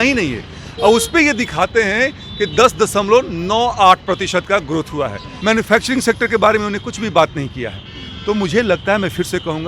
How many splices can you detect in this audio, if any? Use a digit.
1